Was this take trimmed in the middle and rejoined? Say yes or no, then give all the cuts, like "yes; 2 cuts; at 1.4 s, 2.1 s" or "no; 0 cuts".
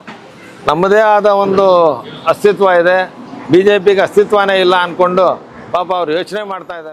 no; 0 cuts